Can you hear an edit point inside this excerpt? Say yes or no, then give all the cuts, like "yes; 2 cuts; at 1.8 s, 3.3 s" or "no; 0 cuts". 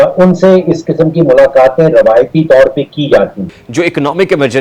yes; 1 cut; at 3.5 s